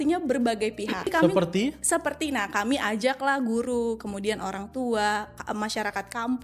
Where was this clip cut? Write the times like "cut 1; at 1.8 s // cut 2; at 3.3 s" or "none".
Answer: cut 1; at 1.1 s